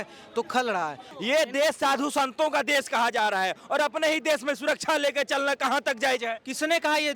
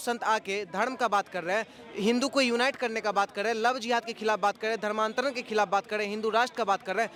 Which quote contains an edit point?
first; 1 cut; at 1.1 s

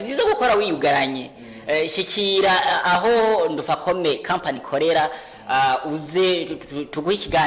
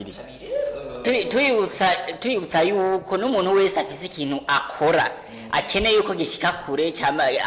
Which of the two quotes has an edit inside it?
second; 1 cut; at 1.0 s

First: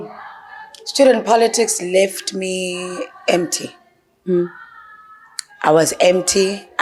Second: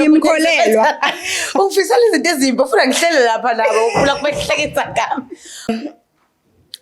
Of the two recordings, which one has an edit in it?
second; 1 cut; at 5.7 s

